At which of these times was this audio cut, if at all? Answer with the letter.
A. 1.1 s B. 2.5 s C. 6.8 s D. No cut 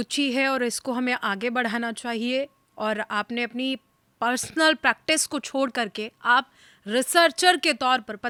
D